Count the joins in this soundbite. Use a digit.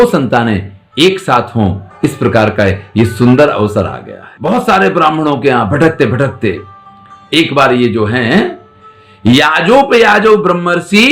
1